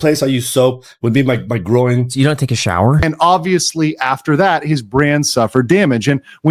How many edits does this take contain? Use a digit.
1